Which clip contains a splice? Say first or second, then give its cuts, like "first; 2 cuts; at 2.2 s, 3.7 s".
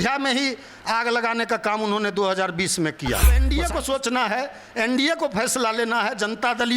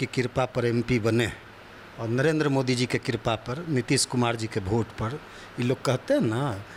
first; 1 cut; at 3.4 s